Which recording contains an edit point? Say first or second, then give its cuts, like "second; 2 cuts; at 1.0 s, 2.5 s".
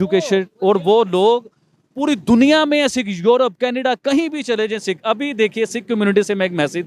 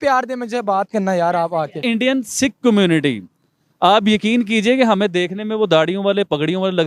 second; 1 cut; at 1.8 s